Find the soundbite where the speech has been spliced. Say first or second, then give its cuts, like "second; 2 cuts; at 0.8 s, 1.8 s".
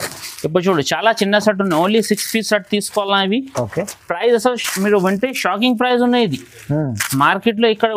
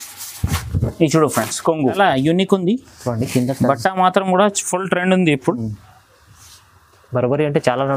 second; 1 cut; at 1.9 s